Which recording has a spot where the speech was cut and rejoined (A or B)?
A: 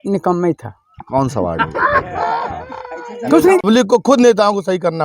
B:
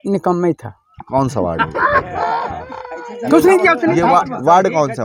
A